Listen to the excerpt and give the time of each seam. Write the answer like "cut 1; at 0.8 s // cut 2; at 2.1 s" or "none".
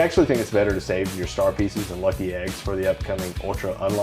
none